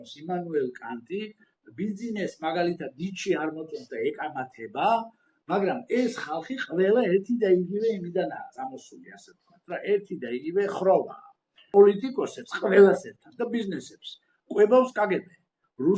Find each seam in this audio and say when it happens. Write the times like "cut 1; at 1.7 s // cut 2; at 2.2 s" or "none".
cut 1; at 11.7 s